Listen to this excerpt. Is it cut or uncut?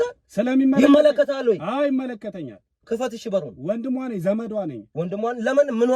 uncut